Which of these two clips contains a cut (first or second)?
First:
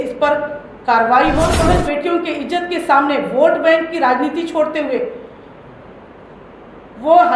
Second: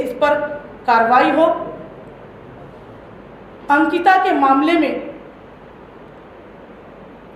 first